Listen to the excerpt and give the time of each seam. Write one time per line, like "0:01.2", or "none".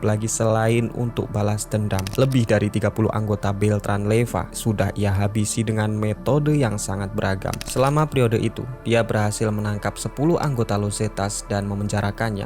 0:02.1
0:07.6